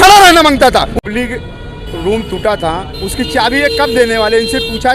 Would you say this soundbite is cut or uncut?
cut